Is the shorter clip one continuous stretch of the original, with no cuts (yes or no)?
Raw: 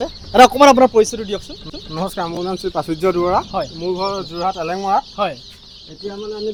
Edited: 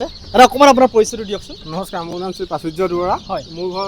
no